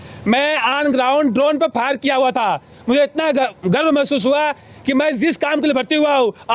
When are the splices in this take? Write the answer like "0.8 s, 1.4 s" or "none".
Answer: none